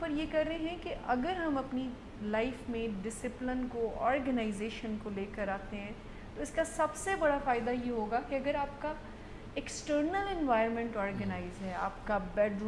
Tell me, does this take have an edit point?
no; 0 cuts

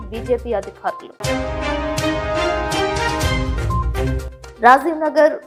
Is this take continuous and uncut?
yes; 0 cuts

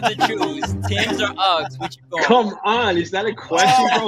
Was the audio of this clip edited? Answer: no; 0 cuts

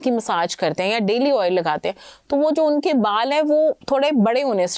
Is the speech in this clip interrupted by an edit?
no; 0 cuts

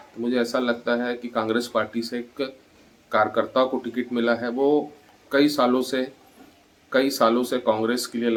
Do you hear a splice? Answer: no; 0 cuts

